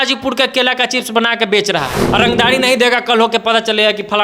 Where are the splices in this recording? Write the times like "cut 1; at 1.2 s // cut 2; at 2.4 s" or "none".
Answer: cut 1; at 2.0 s